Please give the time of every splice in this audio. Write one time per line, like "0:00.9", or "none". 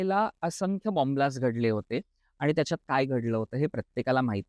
none